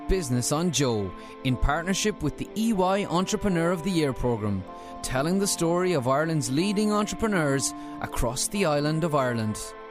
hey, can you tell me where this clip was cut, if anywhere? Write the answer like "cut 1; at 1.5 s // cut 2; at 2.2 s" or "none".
none